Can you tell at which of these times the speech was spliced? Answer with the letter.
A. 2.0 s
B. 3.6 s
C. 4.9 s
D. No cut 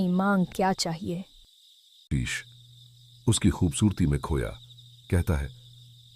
A